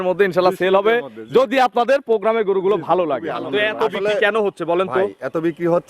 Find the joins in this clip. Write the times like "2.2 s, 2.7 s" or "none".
3.4 s